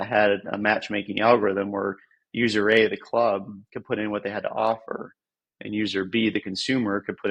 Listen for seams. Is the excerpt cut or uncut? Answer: uncut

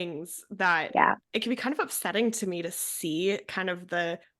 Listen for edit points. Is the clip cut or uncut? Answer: cut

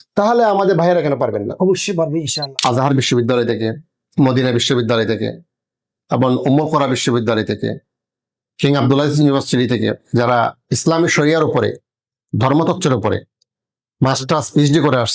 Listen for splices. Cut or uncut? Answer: cut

